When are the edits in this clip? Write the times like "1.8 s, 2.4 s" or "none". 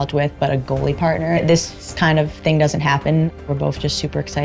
1.6 s, 3.5 s